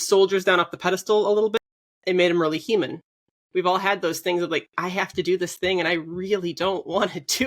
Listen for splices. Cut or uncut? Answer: cut